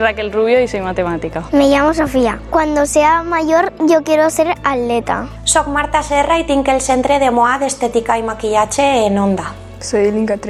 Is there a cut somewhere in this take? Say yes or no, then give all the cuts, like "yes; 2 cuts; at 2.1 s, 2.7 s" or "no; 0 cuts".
no; 0 cuts